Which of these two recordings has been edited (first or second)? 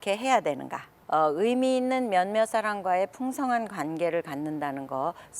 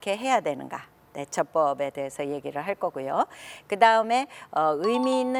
first